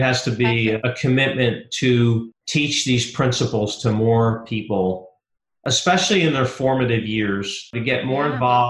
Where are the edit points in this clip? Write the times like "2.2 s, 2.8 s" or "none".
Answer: 0.8 s, 2.4 s, 7.8 s

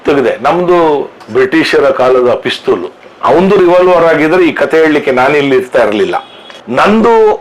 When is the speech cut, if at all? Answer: 1.2 s, 3.0 s

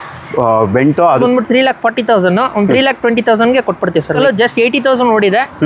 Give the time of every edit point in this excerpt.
1.2 s, 4.2 s

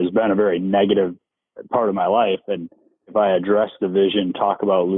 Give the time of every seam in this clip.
3.0 s

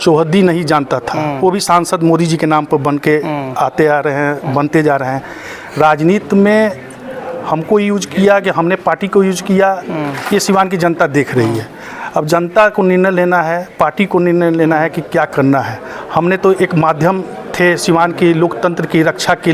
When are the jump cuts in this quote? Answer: none

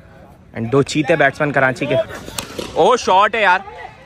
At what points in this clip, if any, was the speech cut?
2.0 s

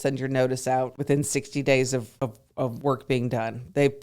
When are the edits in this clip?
1.0 s, 2.6 s

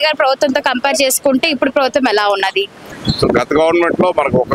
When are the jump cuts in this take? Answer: 2.9 s

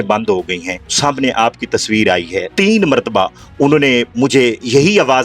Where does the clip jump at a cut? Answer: 0.9 s, 2.5 s

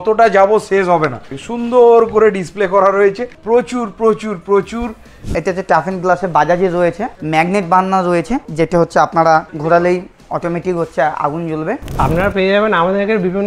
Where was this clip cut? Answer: 1.4 s, 3.3 s, 5.2 s, 7.2 s, 8.4 s, 9.5 s, 10.2 s, 11.9 s

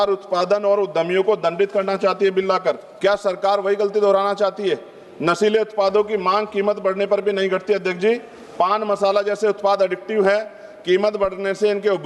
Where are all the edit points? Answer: 2.9 s

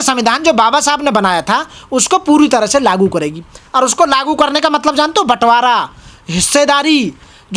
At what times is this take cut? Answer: none

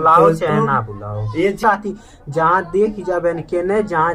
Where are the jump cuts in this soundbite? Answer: 1.6 s

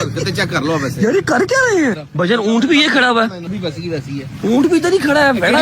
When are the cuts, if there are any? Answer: 2.0 s, 3.5 s

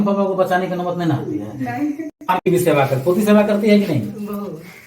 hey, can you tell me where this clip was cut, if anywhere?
2.4 s

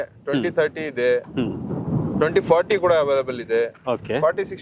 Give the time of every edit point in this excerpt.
none

